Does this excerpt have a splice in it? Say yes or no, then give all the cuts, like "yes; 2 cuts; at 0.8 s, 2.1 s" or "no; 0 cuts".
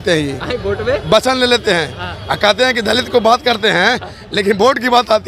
no; 0 cuts